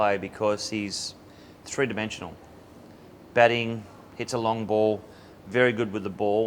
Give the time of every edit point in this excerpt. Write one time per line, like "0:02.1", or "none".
none